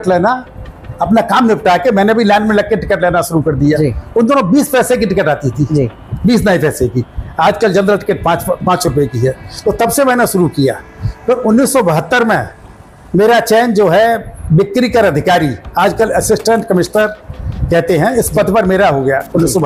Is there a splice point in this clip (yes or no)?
no